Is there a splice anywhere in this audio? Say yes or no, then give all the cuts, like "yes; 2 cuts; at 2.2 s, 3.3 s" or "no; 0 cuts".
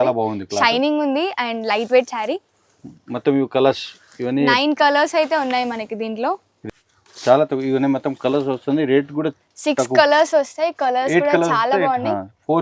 yes; 1 cut; at 6.5 s